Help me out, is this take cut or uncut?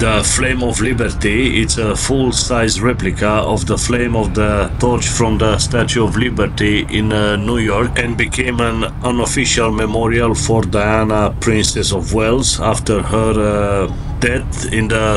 uncut